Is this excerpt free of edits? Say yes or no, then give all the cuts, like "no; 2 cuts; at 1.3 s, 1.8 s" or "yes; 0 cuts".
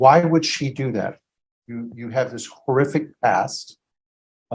yes; 0 cuts